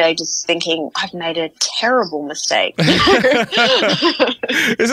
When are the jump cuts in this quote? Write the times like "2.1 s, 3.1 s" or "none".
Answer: 1.0 s